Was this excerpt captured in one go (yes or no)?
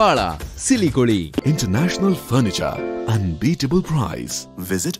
no